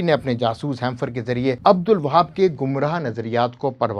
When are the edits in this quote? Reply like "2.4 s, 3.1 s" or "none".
none